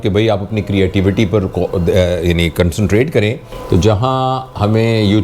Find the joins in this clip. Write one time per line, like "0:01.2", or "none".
0:03.5